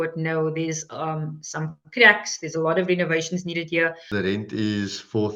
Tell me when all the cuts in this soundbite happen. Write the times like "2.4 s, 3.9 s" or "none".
4.0 s